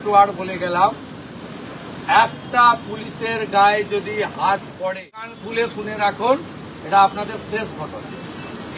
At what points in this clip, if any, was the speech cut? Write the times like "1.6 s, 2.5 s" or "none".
5.4 s